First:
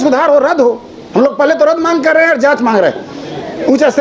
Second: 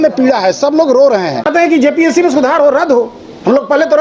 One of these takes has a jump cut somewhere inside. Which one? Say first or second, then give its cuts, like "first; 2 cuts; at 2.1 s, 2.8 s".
second; 1 cut; at 1.4 s